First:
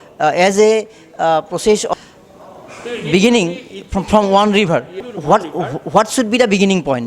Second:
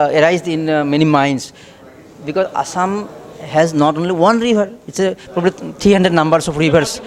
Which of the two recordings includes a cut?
first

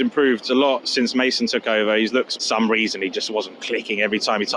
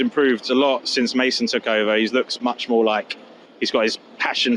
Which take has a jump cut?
first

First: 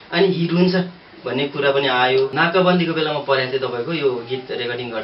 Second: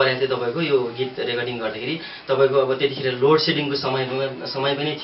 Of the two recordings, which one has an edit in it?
first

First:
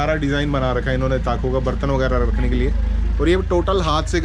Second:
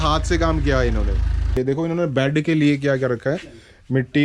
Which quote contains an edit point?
second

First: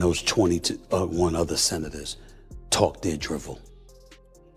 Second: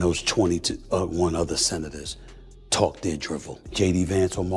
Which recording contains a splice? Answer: second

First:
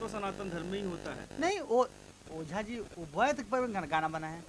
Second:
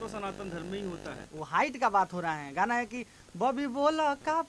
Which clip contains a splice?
second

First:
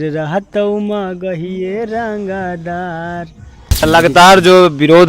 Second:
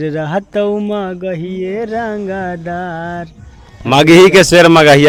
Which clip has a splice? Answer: first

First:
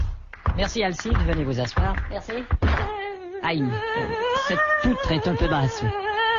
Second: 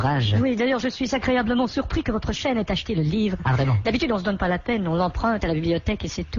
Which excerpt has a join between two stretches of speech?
second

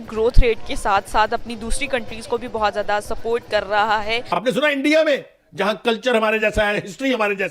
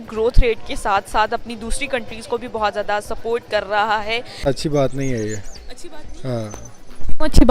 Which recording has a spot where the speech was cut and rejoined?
first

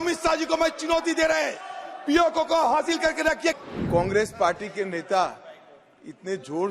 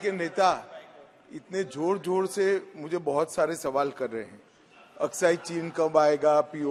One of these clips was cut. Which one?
first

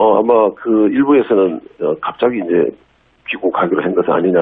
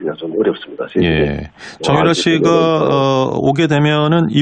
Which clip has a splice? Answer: second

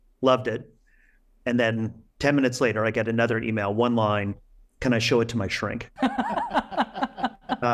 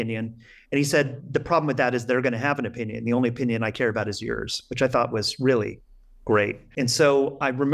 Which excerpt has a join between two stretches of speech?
second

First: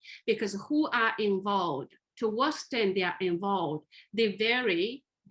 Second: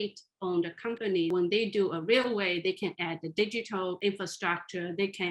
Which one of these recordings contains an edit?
second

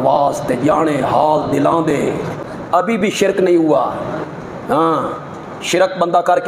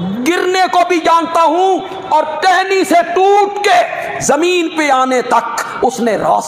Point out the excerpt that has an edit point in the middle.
first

